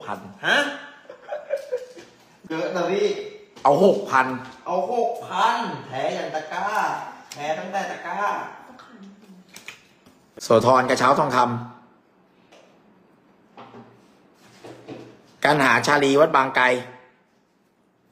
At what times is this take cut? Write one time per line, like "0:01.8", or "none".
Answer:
0:02.4
0:10.4